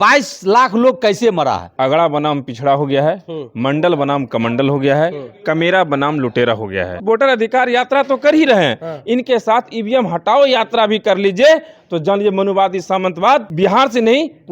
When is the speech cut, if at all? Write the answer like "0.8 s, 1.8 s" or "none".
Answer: 1.7 s, 7.0 s, 13.5 s